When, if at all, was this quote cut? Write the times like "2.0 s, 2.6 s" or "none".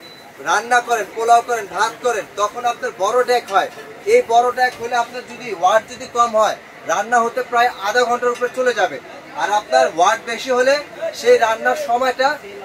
none